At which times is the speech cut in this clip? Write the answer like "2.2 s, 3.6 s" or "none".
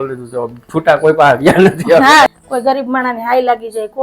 2.3 s